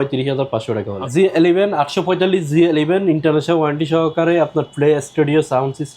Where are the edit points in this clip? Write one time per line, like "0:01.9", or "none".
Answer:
0:01.0

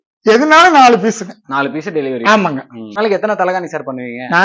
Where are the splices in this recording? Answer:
0:03.0

